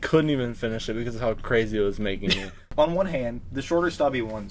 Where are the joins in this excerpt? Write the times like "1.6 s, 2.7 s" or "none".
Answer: 2.6 s